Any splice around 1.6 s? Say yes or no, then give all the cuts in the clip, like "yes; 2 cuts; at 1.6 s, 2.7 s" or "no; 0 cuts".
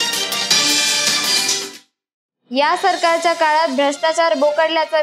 yes; 1 cut; at 1.6 s